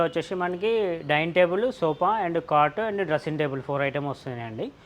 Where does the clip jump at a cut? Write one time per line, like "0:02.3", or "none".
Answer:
none